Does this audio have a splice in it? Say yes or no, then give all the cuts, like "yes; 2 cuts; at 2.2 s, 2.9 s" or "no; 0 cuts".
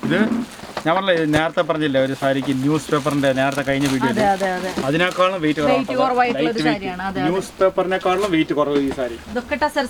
no; 0 cuts